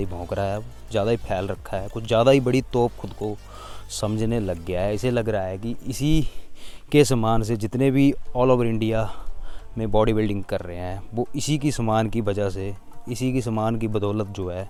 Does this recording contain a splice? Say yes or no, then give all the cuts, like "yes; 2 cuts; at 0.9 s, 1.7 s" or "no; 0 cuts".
no; 0 cuts